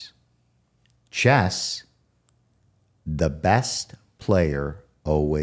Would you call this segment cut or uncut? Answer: uncut